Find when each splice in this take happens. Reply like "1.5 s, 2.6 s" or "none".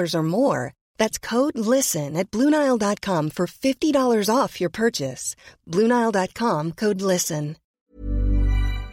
7.8 s